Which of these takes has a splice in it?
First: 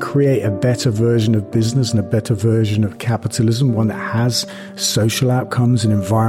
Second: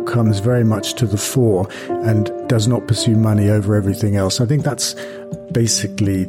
second; 1 cut; at 2.3 s

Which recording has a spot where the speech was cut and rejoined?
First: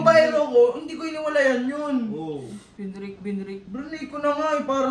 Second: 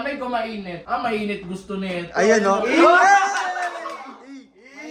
first; 2 cuts; at 2.6 s, 3.6 s

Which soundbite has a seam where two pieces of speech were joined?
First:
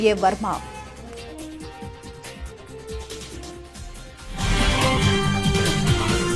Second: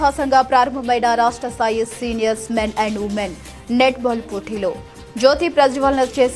first; 2 cuts; at 2.2 s, 5.0 s

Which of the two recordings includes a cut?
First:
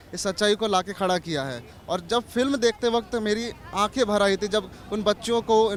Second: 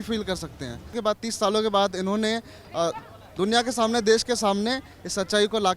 second; 1 cut; at 1.0 s

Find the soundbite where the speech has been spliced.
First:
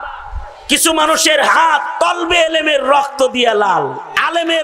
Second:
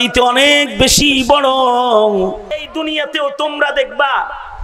second; 1 cut; at 2.6 s

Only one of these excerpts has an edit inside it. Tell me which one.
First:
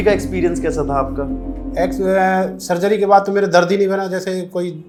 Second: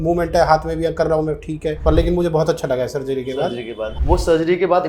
second; 2 cuts; at 1.8 s, 3.9 s

